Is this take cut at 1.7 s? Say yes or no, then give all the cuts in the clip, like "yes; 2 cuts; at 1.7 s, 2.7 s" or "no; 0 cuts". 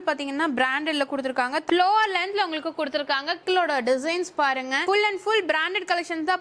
yes; 2 cuts; at 1.7 s, 3.4 s